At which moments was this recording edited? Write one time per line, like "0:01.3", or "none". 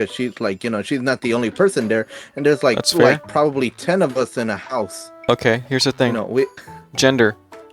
0:05.1

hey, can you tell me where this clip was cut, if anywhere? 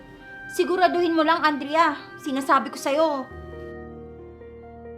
none

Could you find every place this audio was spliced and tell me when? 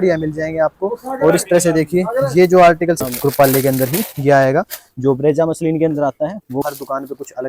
0:03.0
0:06.6

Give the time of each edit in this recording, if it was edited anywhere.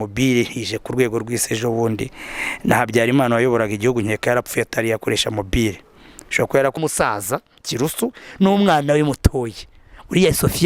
0:06.8

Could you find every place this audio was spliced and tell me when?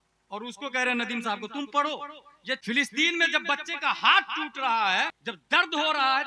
0:02.6
0:05.3

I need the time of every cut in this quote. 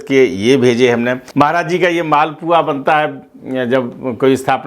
0:01.2

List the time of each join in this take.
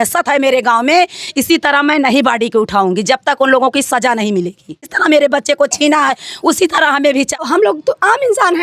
0:05.0
0:07.4

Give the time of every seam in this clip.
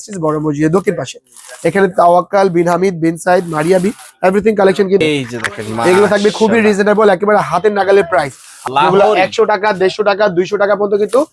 0:05.0
0:08.5

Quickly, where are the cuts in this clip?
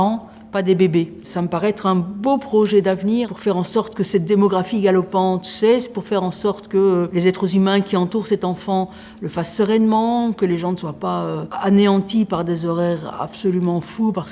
0:03.3
0:07.1
0:11.5

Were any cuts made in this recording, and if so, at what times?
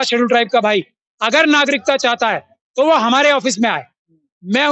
none

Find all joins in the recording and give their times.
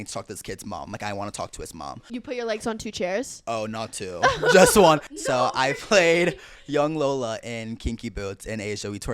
0:02.1
0:05.1

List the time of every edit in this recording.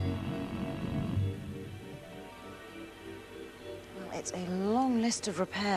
0:02.7

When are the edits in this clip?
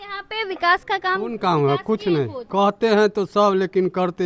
0:02.4

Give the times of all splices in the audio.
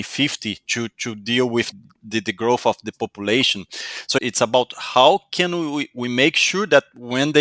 0:01.8
0:04.2

